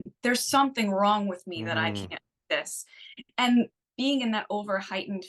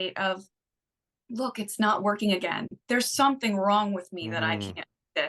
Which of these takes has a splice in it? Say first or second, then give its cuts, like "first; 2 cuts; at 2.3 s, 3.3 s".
first; 1 cut; at 3.8 s